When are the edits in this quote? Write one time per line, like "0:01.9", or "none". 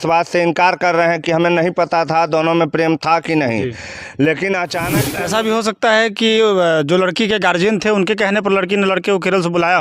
0:05.0